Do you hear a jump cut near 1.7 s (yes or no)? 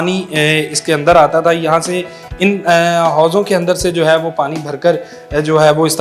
no